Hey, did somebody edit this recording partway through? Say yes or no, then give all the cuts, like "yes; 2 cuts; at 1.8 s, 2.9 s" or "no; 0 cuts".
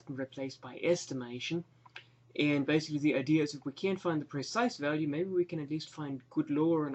no; 0 cuts